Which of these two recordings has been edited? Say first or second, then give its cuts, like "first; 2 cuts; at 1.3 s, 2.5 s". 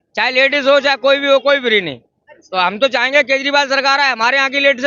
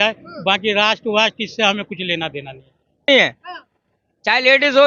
second; 1 cut; at 3.1 s